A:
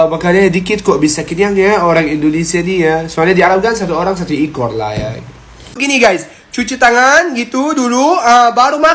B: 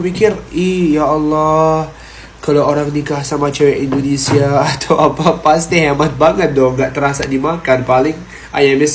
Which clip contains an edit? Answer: A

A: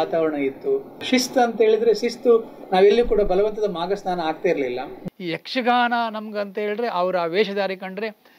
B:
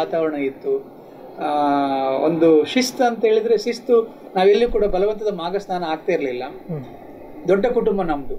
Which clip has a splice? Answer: A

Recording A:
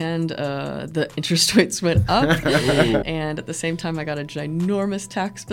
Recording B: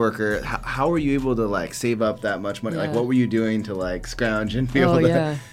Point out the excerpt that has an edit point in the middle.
A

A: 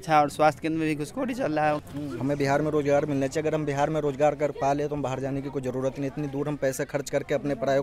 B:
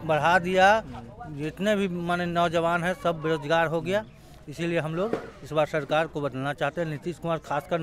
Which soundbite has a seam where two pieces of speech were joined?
A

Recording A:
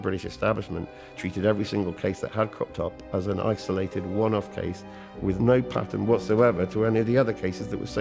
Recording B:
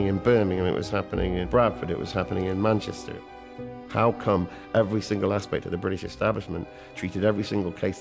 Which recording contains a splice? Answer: B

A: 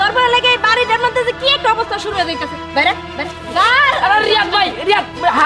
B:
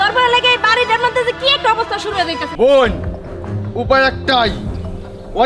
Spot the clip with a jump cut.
B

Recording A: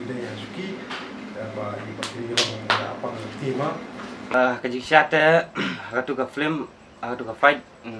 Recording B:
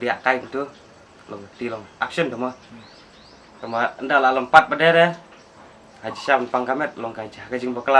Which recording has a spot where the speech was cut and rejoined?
A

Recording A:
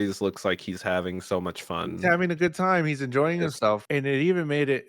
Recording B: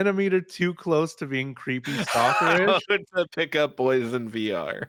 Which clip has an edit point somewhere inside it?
A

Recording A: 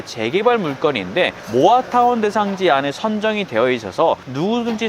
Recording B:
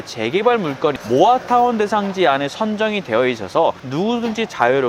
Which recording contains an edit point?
B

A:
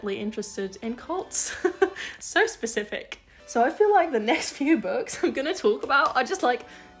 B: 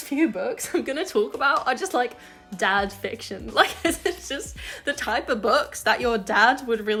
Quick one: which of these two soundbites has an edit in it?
A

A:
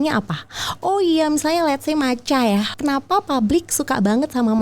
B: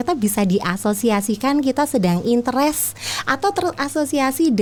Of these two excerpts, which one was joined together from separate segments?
A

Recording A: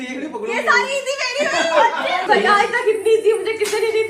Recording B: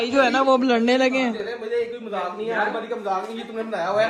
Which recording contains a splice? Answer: A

